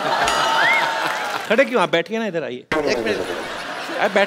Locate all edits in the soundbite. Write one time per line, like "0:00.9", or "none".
0:01.4